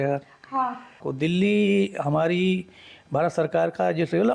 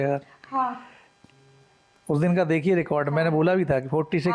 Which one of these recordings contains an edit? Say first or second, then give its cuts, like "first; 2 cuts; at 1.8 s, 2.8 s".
first; 1 cut; at 1.0 s